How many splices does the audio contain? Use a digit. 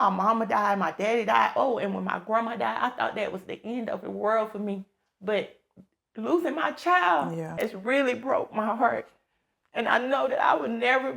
1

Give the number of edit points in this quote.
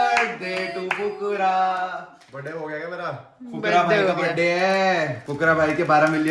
1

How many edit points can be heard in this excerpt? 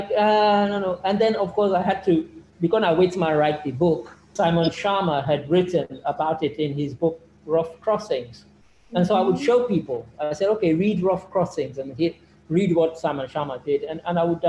1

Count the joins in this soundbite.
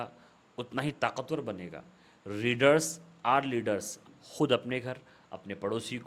1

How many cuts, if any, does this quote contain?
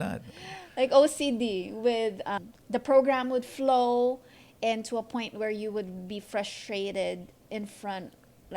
1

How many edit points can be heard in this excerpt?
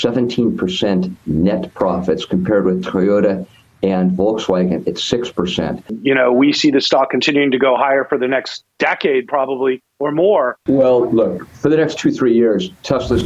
2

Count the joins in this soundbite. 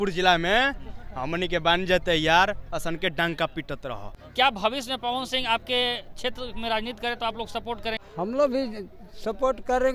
2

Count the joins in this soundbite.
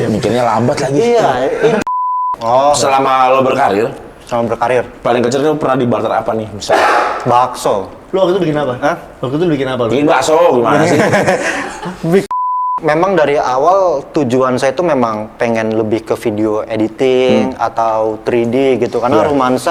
3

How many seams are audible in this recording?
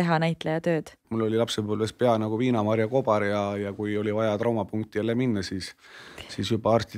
1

